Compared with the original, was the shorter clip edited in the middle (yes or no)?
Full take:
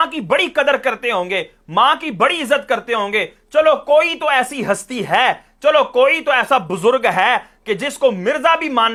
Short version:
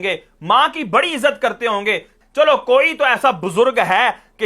yes